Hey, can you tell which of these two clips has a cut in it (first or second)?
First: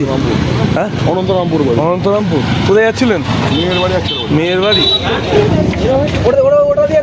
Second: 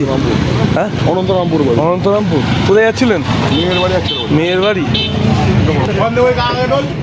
first